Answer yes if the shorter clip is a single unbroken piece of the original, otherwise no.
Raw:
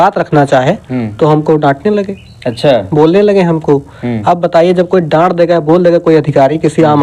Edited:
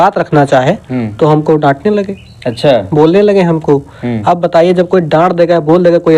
yes